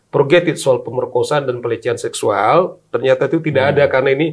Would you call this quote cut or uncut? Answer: uncut